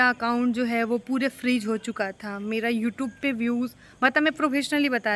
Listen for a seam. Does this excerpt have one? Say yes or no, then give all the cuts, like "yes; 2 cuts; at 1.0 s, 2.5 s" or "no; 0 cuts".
no; 0 cuts